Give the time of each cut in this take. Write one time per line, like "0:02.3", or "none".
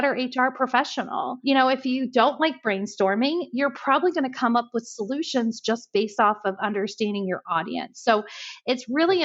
0:01.4